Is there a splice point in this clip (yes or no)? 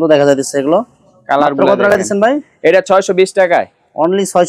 no